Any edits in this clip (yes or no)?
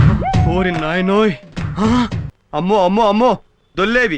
yes